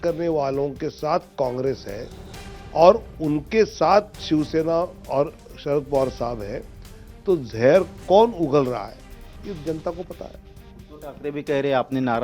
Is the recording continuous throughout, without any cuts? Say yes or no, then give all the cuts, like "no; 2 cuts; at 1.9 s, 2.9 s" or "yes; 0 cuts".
yes; 0 cuts